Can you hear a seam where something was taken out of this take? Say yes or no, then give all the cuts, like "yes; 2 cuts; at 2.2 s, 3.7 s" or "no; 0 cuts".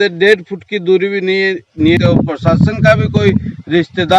yes; 1 cut; at 2.0 s